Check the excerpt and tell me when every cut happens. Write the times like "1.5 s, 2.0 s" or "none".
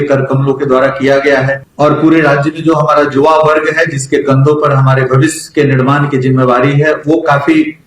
1.6 s